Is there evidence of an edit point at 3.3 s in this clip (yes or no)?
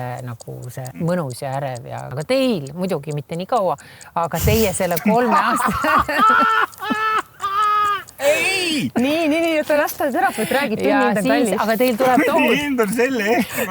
no